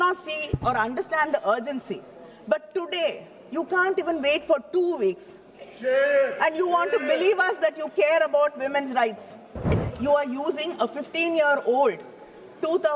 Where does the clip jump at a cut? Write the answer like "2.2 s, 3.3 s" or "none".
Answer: 9.8 s